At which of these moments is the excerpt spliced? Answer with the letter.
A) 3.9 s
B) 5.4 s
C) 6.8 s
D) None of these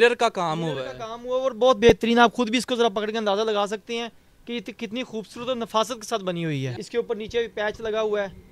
C